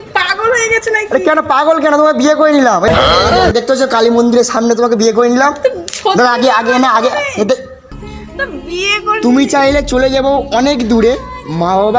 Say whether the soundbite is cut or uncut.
cut